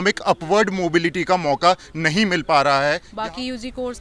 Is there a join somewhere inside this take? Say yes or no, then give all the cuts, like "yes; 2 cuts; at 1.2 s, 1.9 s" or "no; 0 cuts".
yes; 1 cut; at 3.1 s